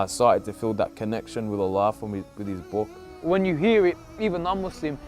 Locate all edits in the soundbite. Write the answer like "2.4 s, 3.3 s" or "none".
3.0 s